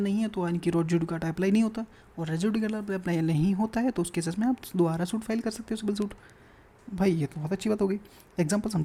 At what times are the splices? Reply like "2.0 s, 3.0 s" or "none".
none